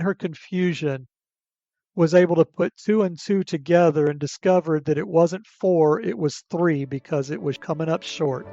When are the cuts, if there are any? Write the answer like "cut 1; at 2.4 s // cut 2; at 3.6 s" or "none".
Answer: cut 1; at 7.6 s

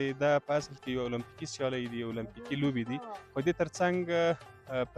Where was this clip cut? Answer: cut 1; at 3.2 s

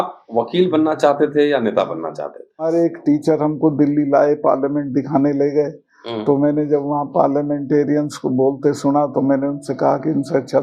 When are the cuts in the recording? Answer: cut 1; at 2.6 s

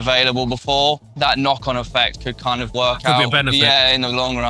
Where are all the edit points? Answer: cut 1; at 1.1 s // cut 2; at 2.7 s

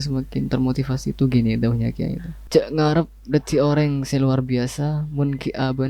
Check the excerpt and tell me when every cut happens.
cut 1; at 2.3 s

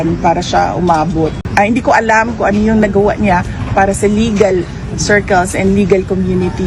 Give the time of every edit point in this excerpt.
cut 1; at 1.4 s

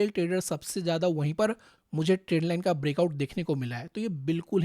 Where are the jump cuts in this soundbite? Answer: cut 1; at 1.7 s

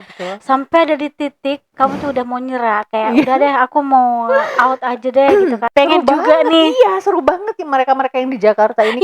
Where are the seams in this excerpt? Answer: cut 1; at 5.6 s

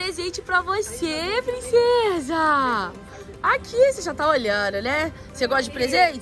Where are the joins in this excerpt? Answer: none

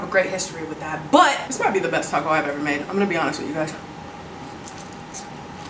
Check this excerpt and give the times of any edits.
cut 1; at 1.4 s

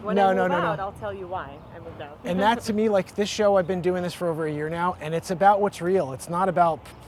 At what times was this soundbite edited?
none

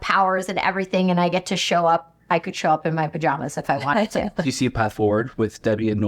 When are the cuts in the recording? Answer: cut 1; at 4.4 s

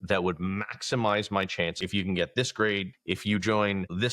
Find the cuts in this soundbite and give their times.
cut 1; at 1.8 s // cut 2; at 2.9 s

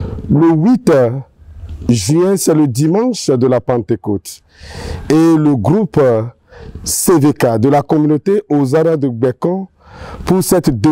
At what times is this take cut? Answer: none

